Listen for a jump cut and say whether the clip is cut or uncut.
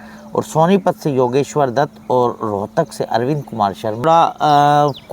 cut